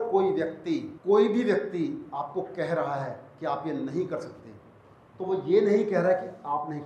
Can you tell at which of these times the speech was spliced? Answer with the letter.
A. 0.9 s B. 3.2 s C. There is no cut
A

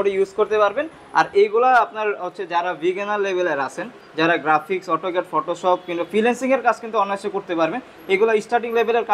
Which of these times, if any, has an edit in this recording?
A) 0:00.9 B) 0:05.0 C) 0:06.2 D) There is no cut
D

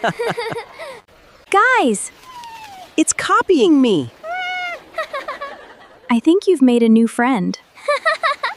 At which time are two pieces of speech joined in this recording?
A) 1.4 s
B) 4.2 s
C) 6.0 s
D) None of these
A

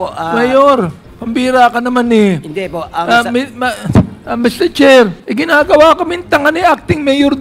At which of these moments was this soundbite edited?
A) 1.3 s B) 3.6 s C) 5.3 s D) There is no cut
C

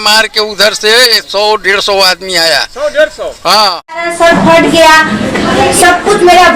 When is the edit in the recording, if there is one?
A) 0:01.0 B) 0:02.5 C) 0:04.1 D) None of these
C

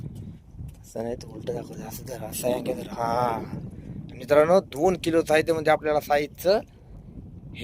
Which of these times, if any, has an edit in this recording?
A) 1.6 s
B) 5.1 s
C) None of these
C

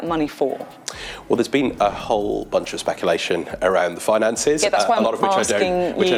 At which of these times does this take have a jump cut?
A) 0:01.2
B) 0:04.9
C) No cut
C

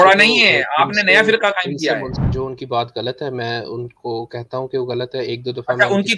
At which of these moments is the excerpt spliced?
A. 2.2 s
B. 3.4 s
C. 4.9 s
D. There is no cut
A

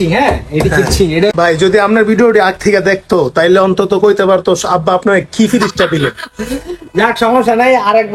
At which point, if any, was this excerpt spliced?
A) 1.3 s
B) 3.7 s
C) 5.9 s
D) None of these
A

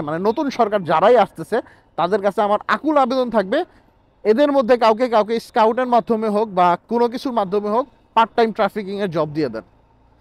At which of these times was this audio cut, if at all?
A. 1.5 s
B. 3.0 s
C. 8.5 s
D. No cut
D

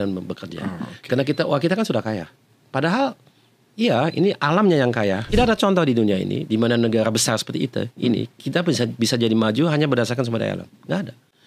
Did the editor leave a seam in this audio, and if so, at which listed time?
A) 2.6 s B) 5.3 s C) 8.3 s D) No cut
B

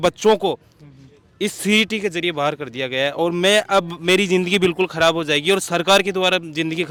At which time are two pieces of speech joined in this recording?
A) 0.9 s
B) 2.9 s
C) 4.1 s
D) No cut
D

